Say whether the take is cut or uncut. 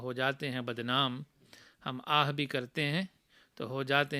uncut